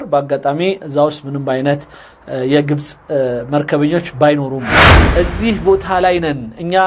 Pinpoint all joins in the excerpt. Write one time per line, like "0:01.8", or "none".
0:05.0

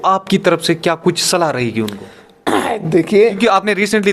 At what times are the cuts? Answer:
none

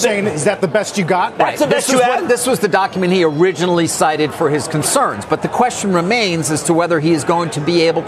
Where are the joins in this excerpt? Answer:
none

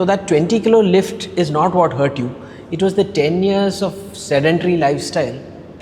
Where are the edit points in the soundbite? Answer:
none

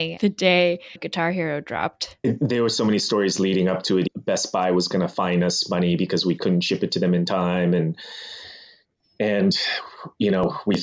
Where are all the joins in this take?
0:04.1

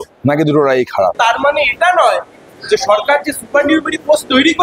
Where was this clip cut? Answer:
0:01.1

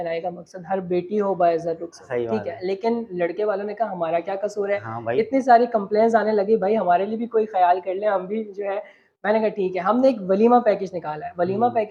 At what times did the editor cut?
none

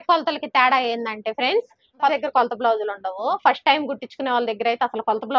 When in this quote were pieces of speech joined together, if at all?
0:02.1

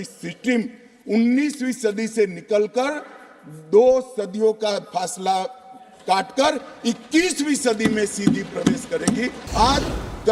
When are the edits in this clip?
0:09.4

